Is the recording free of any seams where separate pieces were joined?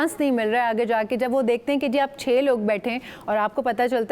yes; 0 cuts

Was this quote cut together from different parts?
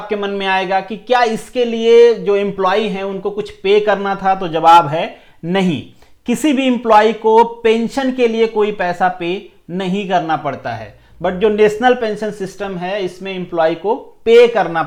no; 0 cuts

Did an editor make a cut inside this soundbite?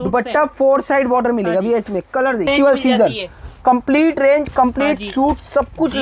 yes; 1 cut; at 2.5 s

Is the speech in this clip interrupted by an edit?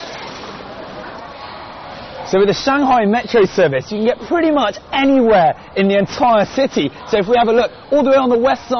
yes; 1 cut; at 2.1 s

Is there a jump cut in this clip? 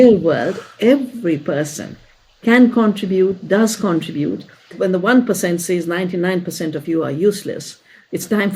yes; 1 cut; at 4.7 s

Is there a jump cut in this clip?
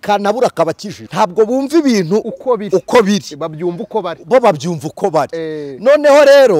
yes; 1 cut; at 1.0 s

